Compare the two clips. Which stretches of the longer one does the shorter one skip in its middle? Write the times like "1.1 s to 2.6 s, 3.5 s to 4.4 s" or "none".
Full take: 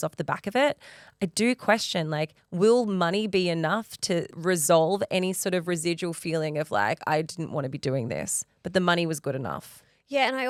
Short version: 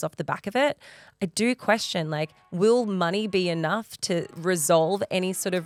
none